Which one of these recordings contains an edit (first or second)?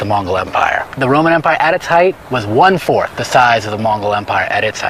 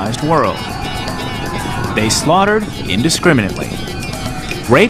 second